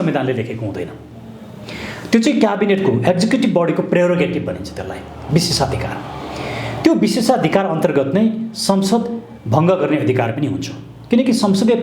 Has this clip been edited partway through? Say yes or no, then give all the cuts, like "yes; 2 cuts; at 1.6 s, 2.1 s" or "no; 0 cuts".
no; 0 cuts